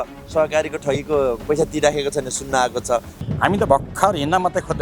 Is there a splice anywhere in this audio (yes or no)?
yes